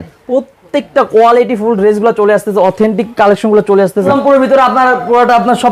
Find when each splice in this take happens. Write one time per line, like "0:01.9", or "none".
0:04.2